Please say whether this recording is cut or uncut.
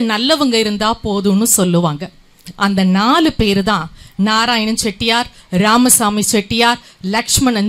uncut